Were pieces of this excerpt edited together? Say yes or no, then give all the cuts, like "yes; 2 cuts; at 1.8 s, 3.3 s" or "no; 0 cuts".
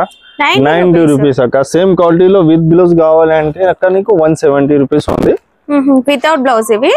no; 0 cuts